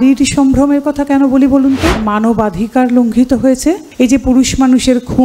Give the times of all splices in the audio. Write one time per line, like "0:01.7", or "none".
0:02.0
0:03.9